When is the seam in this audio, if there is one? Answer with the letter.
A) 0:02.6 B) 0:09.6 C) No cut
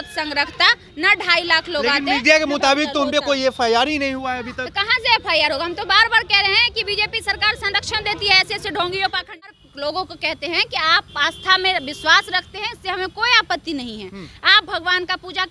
B